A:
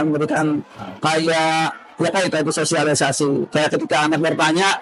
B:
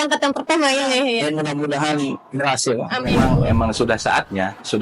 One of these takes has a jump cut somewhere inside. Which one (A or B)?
B